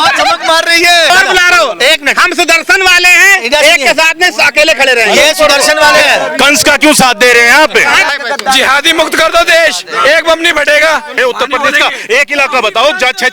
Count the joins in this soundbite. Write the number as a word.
three